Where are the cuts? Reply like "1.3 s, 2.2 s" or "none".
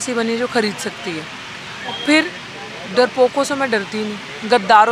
none